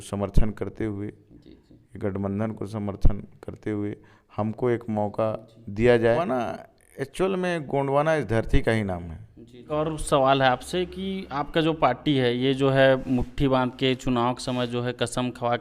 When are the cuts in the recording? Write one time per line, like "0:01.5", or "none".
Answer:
0:06.2
0:09.6